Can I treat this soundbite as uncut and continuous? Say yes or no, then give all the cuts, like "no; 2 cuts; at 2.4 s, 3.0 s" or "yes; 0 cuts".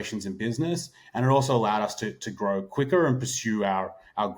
yes; 0 cuts